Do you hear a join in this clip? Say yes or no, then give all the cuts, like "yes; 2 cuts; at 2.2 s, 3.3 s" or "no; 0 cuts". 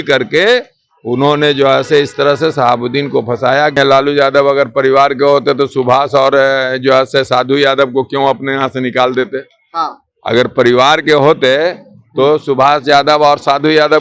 yes; 1 cut; at 3.8 s